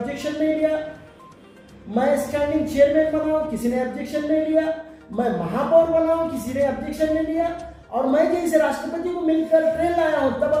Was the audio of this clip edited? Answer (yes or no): no